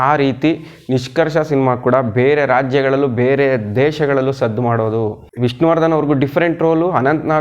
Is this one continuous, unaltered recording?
no; 1 cut; at 5.2 s

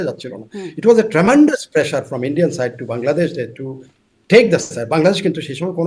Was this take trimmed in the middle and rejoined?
no; 0 cuts

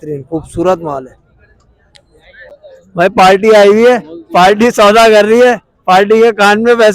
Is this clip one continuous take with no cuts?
no; 1 cut; at 2.5 s

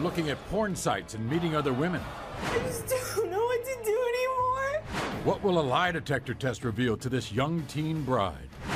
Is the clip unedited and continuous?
yes; 0 cuts

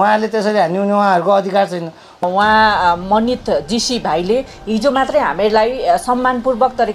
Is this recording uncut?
no; 1 cut; at 2.2 s

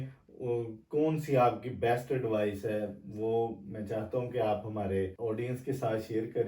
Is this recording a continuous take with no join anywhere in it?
no; 1 cut; at 5.1 s

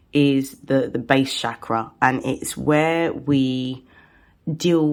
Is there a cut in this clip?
no; 0 cuts

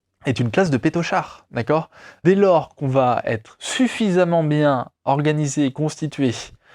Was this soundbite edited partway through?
yes; 1 cut; at 2.0 s

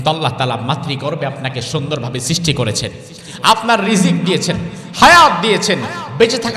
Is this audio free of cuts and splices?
yes; 0 cuts

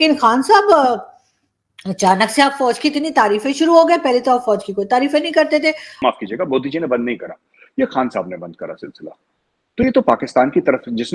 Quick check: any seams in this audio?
yes; 1 cut; at 5.9 s

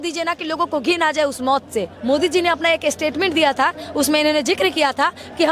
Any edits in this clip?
yes; 1 cut; at 1.9 s

